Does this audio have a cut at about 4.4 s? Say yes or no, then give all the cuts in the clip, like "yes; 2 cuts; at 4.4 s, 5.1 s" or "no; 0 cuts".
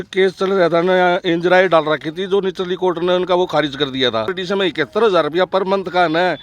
yes; 1 cut; at 4.4 s